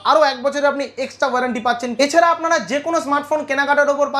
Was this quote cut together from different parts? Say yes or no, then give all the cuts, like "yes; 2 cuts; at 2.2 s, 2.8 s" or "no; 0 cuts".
yes; 1 cut; at 1.9 s